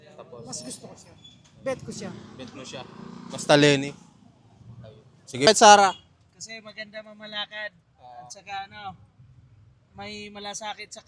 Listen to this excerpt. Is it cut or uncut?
cut